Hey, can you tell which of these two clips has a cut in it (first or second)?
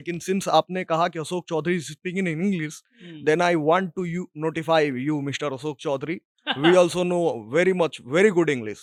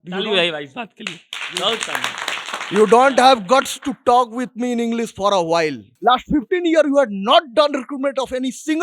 second